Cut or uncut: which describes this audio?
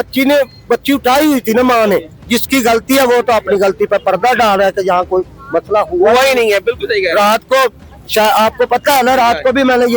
cut